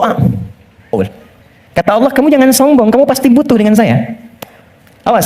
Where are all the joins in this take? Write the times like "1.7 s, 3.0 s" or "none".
0.9 s